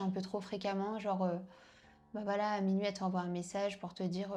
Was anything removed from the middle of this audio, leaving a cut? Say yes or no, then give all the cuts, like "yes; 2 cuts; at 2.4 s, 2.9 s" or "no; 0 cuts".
no; 0 cuts